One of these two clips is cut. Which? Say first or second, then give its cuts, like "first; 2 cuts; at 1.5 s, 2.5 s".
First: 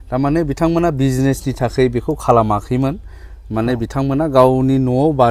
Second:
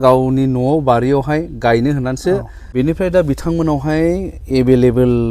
second; 1 cut; at 2.6 s